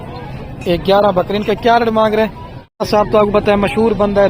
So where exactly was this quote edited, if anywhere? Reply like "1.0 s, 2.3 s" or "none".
2.9 s